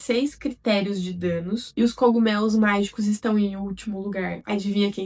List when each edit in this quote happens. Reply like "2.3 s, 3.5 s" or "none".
none